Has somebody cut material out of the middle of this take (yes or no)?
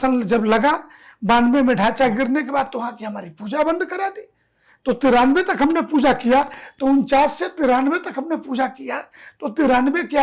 no